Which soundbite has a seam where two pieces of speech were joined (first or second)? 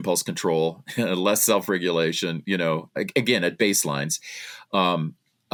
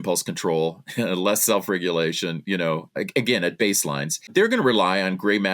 second